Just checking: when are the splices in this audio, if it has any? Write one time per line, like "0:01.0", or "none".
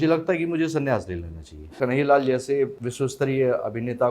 0:01.7
0:02.8